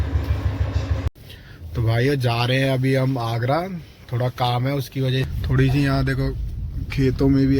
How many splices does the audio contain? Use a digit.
2